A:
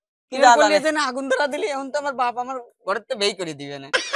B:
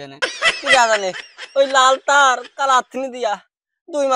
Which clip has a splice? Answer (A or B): B